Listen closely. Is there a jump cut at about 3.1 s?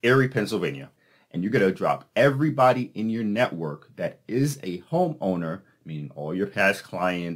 no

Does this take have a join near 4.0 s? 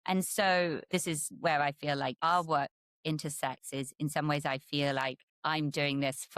no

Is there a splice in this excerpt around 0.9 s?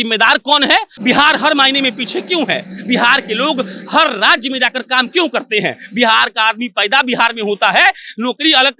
yes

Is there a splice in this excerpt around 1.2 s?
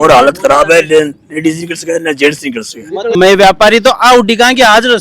no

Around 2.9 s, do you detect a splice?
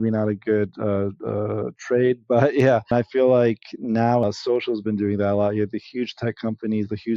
yes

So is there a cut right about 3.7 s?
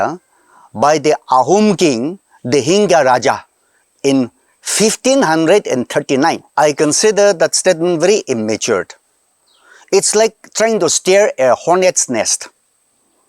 no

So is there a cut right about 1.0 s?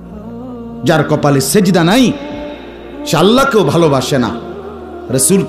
yes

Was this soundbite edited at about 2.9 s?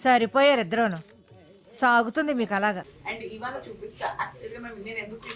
yes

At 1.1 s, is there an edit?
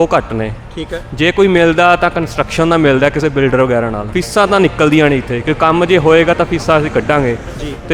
no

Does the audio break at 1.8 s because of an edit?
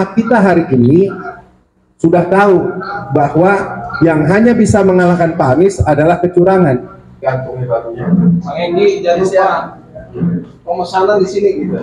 no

